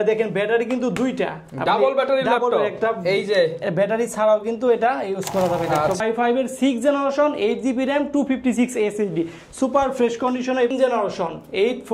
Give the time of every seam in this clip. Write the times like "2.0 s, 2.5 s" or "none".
6.0 s, 10.7 s